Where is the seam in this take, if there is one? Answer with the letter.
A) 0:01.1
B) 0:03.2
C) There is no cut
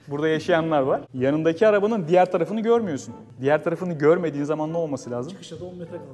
A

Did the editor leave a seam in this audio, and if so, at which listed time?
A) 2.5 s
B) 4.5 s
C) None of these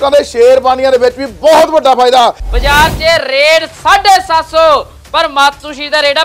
A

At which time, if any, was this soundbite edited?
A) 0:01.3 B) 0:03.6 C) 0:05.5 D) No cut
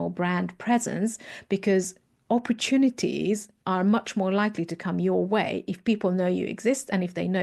D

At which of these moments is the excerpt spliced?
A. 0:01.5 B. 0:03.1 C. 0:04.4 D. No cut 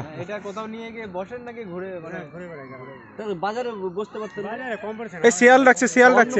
D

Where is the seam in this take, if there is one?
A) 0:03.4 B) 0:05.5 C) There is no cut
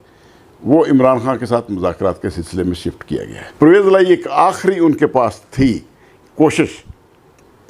A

